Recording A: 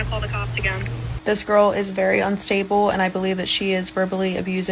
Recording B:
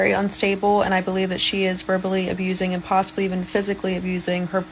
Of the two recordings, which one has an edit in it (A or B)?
A